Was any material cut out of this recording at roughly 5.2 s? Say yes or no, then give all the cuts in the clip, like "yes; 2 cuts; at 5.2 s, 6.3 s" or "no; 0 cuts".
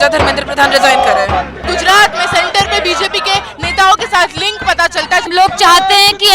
yes; 2 cuts; at 1.6 s, 5.2 s